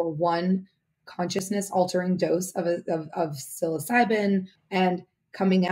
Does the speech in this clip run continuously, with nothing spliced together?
no; 1 cut; at 4.6 s

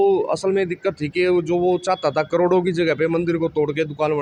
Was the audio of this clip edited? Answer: no; 0 cuts

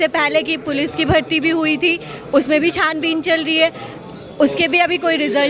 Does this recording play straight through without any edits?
yes; 0 cuts

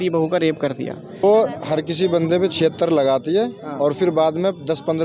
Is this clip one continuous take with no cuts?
no; 1 cut; at 1.2 s

